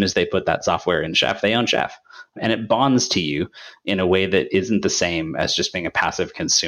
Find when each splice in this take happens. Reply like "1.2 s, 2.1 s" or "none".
2.3 s